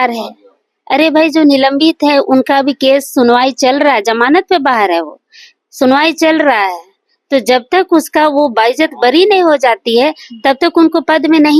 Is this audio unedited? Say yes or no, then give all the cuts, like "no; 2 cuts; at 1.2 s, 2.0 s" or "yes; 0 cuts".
yes; 0 cuts